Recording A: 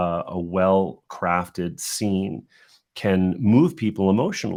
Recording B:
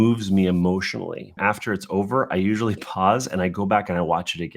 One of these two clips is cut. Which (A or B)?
B